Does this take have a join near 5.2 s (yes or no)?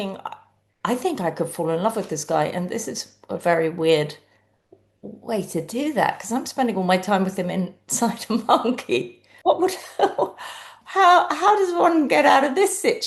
no